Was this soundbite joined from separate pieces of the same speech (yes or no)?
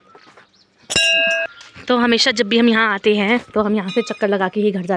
yes